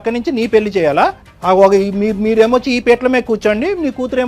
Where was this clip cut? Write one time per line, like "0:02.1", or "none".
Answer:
0:01.3